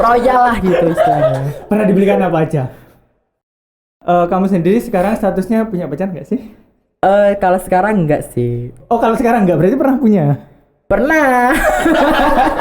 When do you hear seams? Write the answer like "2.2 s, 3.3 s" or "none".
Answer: 3.8 s